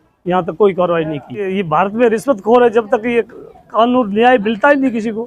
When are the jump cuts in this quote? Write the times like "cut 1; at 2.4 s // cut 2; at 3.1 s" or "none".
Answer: cut 1; at 1.5 s